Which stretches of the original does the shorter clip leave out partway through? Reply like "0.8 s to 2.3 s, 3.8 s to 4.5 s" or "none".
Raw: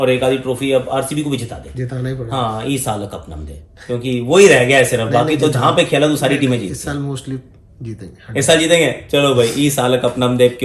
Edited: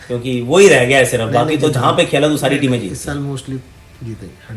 none